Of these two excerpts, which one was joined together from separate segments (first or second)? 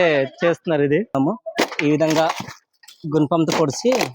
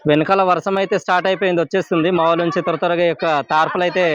first